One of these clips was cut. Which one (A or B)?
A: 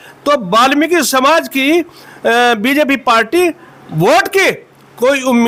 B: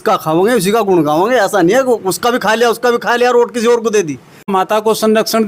B